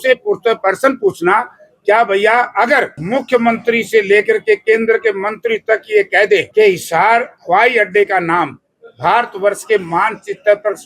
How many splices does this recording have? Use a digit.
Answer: 3